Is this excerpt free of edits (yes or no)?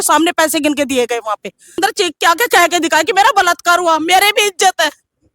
no